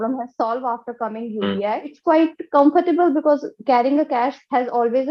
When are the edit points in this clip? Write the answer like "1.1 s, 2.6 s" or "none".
1.9 s